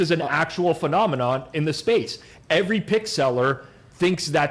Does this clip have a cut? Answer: no; 0 cuts

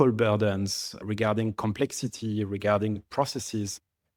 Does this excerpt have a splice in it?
no; 0 cuts

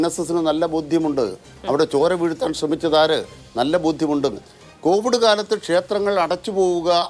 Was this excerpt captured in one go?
no; 1 cut; at 4.5 s

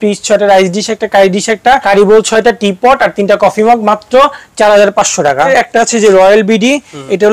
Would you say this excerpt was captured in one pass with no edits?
no; 2 cuts; at 1.8 s, 5.5 s

